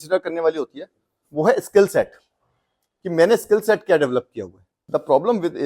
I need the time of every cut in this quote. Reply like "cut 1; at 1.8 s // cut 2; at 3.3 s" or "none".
cut 1; at 4.7 s